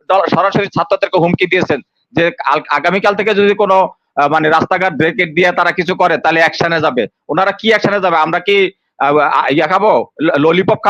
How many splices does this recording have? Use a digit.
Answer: 0